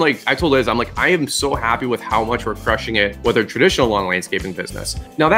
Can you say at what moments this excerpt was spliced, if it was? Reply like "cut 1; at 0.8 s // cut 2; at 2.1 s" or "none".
none